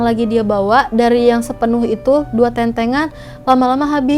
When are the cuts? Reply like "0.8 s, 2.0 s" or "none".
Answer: none